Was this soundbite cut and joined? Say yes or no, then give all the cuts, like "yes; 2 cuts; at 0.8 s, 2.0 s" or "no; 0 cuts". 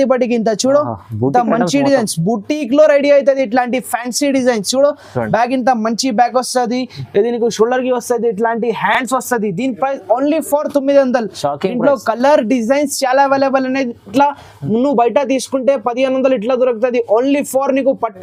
no; 0 cuts